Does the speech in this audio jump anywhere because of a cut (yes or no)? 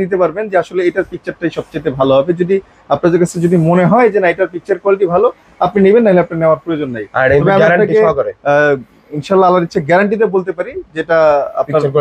no